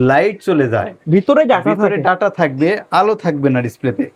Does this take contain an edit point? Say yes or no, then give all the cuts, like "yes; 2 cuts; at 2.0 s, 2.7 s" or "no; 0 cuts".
no; 0 cuts